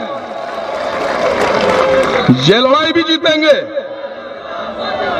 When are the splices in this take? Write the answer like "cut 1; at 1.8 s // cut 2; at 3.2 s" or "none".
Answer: none